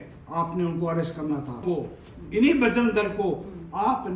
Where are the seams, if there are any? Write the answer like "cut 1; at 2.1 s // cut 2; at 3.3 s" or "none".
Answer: cut 1; at 1.6 s